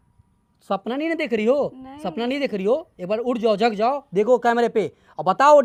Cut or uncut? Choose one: uncut